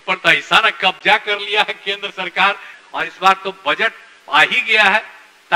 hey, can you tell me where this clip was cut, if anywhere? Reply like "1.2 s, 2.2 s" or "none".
2.7 s

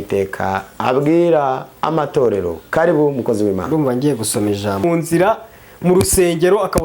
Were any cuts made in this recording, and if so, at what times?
4.8 s

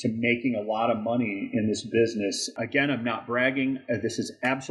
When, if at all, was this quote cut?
2.5 s

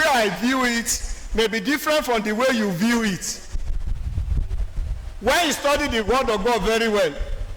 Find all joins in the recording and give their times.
none

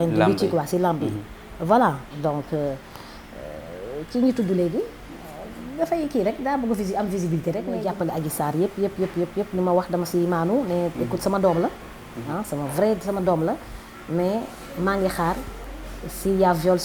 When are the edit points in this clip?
7.8 s

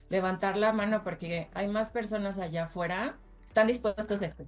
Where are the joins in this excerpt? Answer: 3.2 s

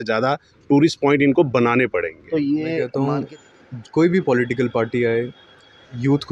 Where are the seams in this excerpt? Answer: 2.9 s

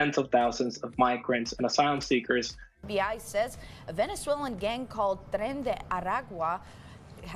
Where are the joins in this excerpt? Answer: 2.6 s

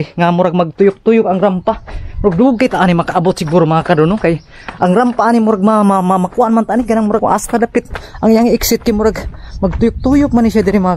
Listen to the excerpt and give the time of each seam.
7.2 s

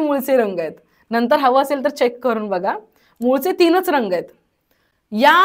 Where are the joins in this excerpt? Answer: none

